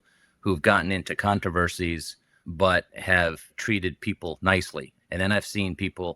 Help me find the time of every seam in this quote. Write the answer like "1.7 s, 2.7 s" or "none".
2.4 s, 3.5 s, 4.9 s